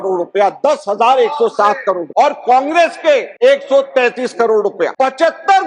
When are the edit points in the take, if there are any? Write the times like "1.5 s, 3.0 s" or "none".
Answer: 2.0 s, 3.3 s, 4.9 s